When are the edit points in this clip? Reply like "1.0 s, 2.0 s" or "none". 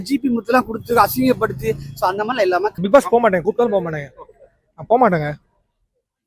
2.8 s